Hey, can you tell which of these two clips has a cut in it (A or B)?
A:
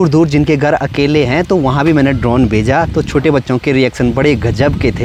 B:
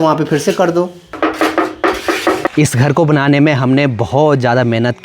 B